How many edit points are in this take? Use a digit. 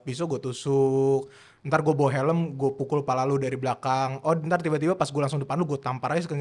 0